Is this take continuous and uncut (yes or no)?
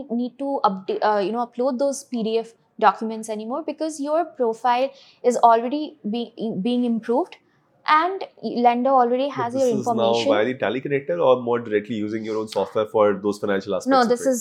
yes